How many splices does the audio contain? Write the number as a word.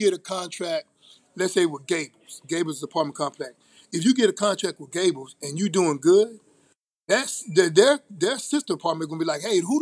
zero